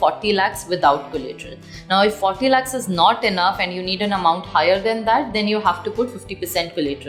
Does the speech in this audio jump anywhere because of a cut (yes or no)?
no